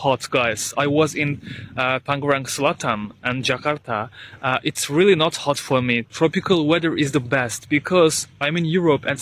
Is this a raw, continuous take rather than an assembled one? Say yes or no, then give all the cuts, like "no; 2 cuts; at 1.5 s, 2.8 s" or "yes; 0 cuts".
yes; 0 cuts